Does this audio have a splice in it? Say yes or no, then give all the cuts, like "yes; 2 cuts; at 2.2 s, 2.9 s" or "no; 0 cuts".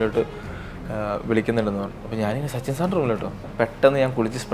yes; 1 cut; at 3.4 s